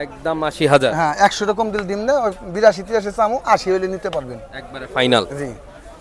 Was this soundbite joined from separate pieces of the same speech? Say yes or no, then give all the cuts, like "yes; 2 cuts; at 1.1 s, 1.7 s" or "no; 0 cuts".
no; 0 cuts